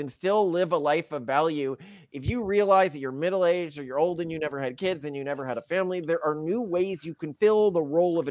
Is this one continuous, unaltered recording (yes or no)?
no